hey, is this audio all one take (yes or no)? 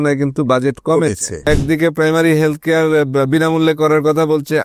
no